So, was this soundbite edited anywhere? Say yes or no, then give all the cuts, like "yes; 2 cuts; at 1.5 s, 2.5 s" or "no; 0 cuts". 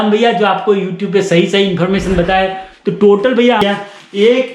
yes; 1 cut; at 3.6 s